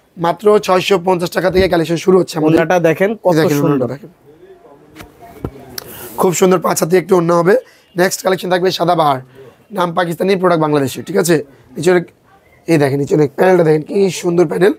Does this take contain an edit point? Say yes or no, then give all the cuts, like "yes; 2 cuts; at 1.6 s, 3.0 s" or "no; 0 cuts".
no; 0 cuts